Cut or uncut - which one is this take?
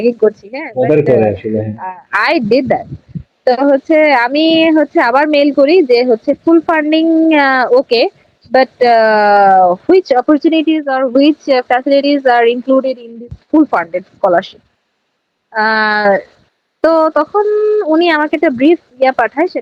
uncut